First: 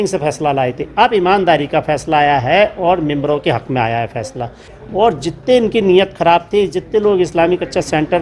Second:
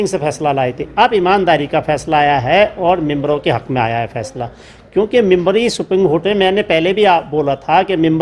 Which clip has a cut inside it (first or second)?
first